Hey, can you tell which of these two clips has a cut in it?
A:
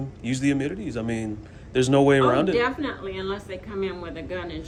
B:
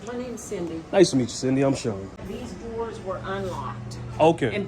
B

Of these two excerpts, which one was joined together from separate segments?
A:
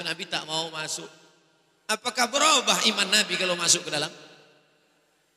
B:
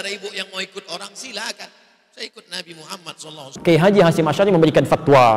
B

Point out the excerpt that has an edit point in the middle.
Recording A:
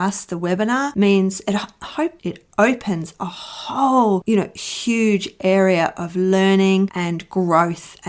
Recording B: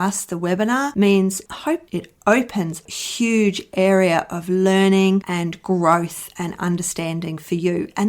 B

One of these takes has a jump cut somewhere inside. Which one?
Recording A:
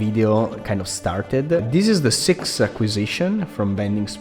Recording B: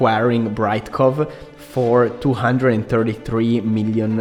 A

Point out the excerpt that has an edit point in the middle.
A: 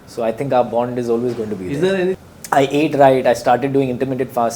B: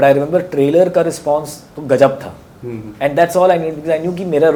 A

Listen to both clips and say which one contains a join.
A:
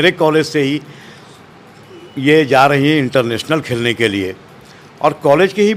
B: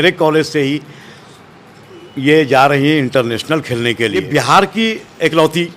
B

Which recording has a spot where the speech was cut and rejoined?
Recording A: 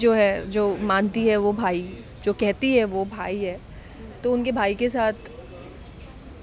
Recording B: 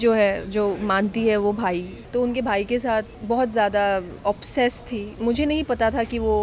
B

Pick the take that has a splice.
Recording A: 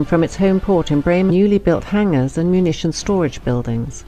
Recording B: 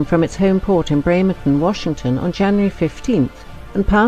B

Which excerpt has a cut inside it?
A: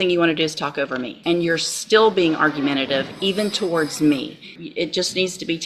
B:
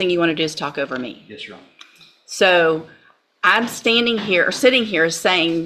A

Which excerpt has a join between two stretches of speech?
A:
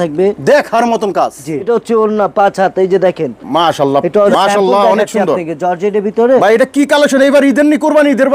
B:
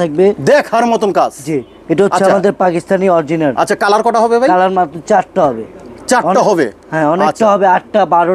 A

